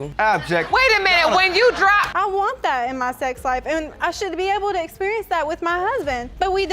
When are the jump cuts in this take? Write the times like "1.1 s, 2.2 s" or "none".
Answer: 2.1 s